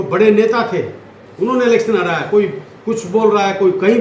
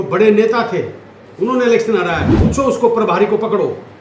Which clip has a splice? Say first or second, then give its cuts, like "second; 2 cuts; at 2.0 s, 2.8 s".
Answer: second; 1 cut; at 2.2 s